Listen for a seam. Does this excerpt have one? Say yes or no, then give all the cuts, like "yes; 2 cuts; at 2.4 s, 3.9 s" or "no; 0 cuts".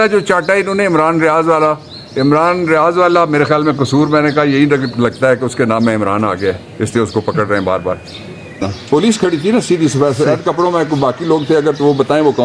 yes; 1 cut; at 8.6 s